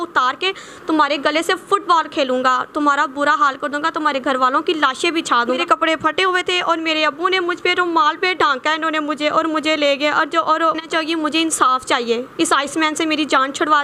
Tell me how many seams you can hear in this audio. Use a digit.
2